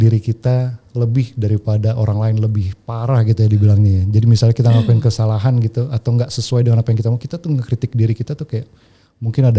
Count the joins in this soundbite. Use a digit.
0